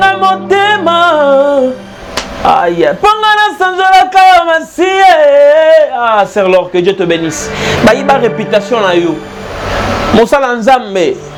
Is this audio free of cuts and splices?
yes; 0 cuts

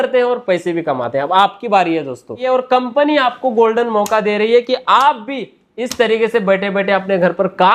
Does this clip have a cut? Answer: yes; 1 cut; at 2.4 s

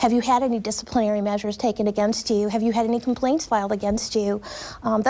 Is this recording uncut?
yes; 0 cuts

